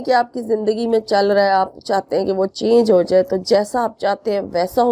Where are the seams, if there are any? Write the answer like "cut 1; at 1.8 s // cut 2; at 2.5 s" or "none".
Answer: none